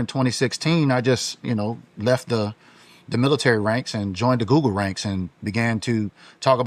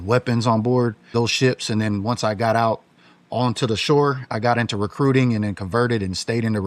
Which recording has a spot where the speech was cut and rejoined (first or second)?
second